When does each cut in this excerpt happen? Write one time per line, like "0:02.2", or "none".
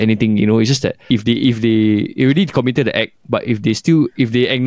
0:01.0